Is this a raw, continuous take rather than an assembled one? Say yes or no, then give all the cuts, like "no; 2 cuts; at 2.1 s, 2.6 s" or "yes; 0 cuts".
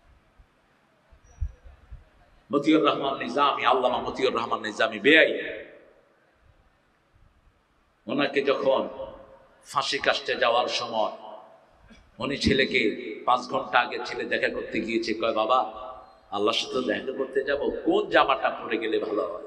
yes; 0 cuts